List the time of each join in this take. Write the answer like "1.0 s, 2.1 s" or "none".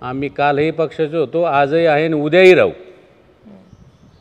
none